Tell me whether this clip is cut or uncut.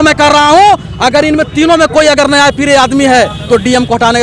uncut